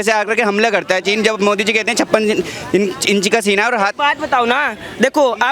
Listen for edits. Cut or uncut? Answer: uncut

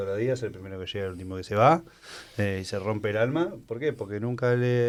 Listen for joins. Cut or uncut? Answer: uncut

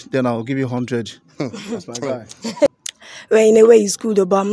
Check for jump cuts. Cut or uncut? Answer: cut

